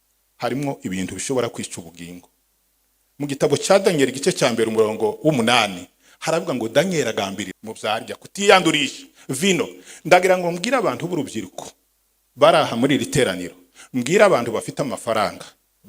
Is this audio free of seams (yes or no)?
no